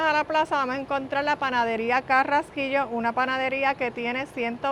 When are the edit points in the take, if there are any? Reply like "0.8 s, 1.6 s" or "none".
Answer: none